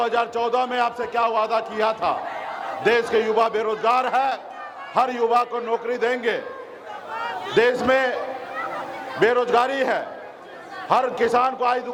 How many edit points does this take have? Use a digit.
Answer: 0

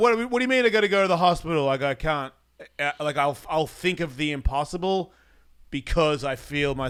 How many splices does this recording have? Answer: 0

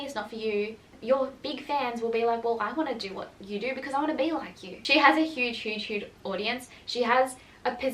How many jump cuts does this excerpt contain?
2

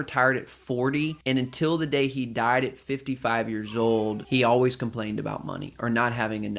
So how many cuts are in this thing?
2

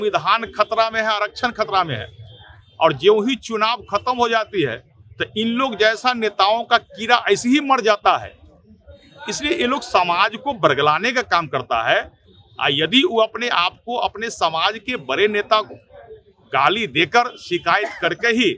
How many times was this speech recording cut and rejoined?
0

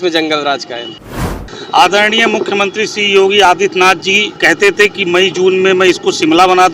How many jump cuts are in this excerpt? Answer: 1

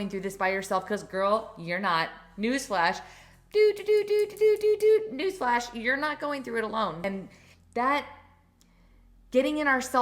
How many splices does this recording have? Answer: 1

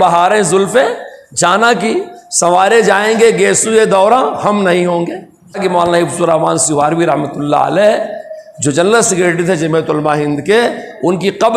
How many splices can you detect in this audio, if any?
1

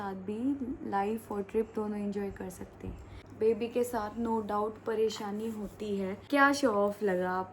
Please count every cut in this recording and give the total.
2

